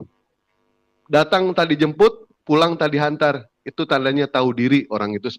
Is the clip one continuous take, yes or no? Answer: yes